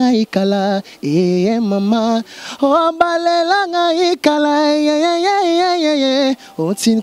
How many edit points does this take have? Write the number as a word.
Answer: zero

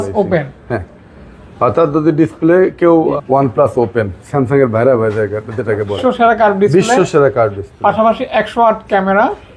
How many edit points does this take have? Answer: two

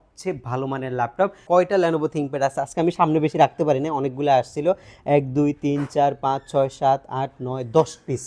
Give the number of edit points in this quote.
one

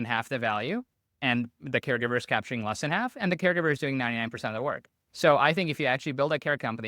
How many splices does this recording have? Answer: one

